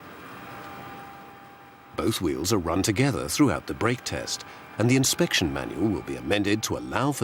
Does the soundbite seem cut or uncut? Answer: uncut